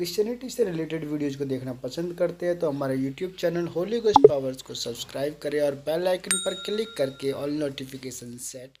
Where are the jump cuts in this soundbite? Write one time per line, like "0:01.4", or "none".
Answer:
none